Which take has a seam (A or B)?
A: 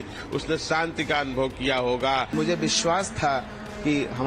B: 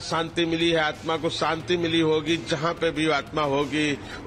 A